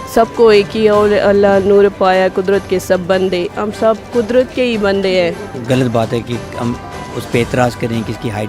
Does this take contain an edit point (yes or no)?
yes